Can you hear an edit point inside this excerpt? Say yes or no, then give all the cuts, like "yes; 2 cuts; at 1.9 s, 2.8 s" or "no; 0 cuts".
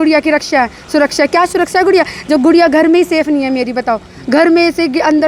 no; 0 cuts